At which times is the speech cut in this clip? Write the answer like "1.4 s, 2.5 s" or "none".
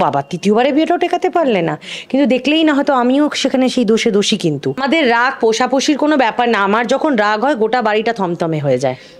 4.8 s